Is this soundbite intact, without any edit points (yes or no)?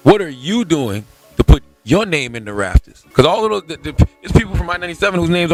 yes